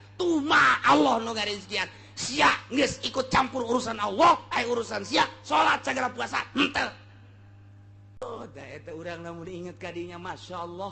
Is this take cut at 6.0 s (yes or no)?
no